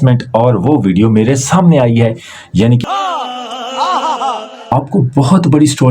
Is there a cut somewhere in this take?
yes; 2 cuts; at 2.8 s, 4.7 s

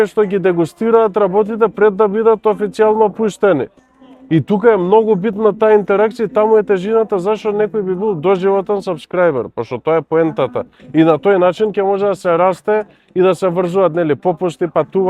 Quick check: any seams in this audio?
no; 0 cuts

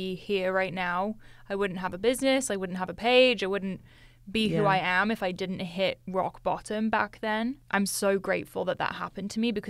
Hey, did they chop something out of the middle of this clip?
no; 0 cuts

